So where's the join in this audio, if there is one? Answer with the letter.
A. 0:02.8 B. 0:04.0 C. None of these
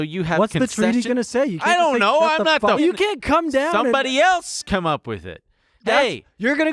A